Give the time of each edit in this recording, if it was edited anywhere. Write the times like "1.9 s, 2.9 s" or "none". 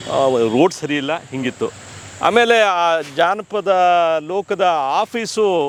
none